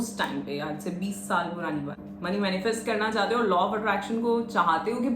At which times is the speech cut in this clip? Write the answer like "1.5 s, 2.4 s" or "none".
2.0 s